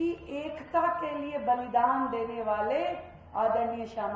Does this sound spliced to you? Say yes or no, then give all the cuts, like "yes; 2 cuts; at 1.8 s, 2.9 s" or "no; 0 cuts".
no; 0 cuts